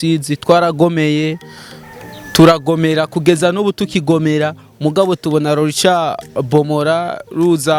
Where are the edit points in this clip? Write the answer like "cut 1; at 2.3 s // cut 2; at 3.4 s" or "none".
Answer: none

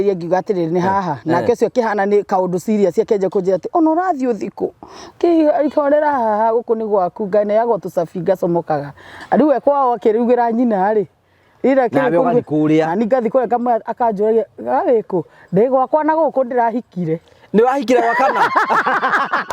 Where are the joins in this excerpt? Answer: none

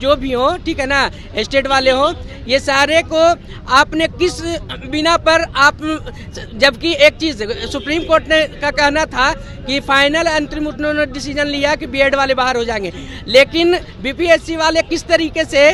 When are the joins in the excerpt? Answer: none

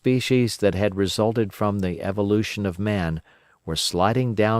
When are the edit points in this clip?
cut 1; at 2.8 s

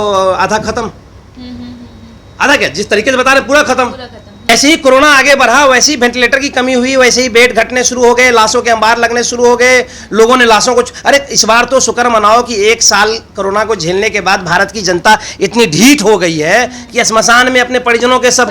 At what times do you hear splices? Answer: cut 1; at 4.5 s

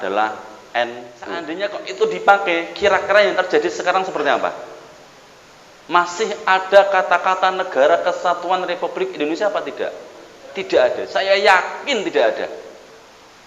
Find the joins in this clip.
cut 1; at 1.5 s

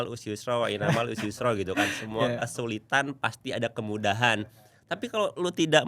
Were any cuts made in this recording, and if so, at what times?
none

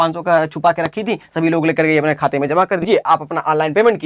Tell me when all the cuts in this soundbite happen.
cut 1; at 2.8 s

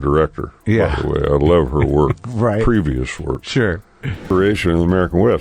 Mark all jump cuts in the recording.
cut 1; at 4.1 s

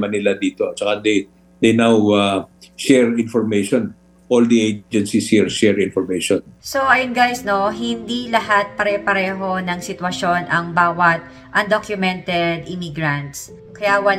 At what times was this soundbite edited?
none

